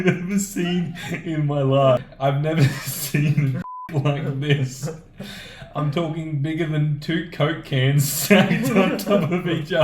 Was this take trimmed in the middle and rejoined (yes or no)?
yes